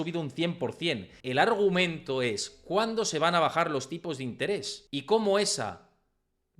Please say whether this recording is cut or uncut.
cut